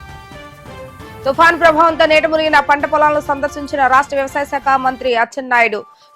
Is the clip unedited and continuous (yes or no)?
no